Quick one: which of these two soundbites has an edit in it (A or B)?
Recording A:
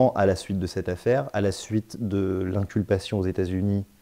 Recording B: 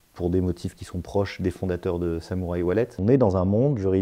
B